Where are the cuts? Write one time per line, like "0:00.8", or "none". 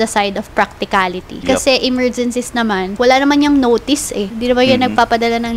0:01.3
0:02.9
0:04.3